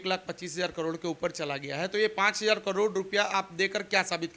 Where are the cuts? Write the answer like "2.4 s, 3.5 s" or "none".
none